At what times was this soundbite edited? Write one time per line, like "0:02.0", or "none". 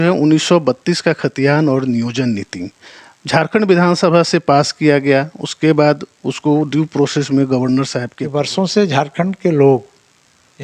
0:08.2